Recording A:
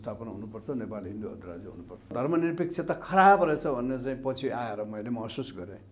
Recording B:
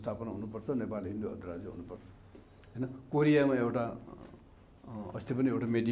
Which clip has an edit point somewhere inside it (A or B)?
A